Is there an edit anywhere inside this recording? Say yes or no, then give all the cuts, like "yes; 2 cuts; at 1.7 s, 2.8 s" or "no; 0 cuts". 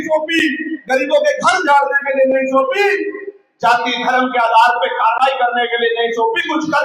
no; 0 cuts